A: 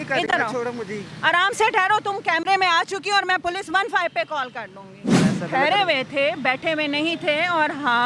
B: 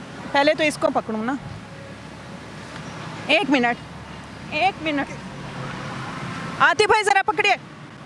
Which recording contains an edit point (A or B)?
A